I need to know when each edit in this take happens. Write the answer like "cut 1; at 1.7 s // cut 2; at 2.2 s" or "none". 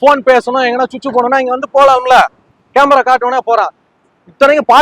none